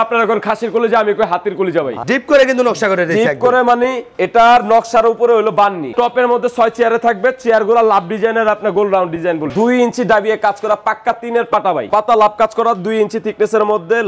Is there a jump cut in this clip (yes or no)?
yes